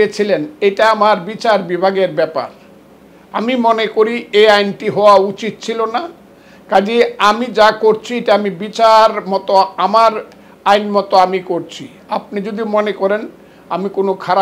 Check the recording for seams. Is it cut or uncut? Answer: uncut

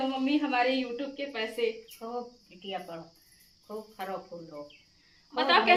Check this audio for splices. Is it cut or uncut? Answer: uncut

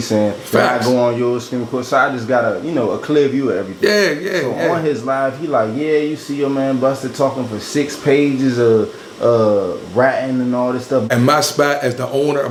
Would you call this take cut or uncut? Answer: uncut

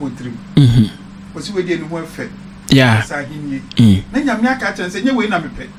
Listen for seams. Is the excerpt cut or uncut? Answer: uncut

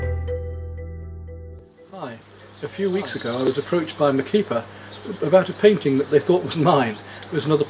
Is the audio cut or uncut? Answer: cut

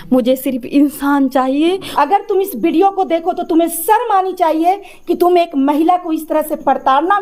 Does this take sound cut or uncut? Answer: cut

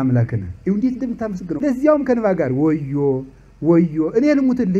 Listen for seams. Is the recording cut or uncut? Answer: cut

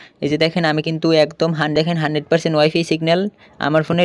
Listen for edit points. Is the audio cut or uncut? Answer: cut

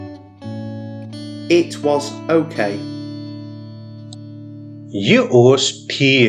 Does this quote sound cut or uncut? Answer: cut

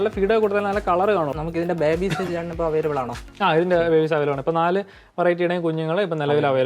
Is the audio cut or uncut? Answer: cut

